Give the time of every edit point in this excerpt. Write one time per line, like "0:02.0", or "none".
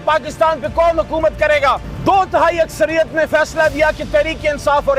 0:01.9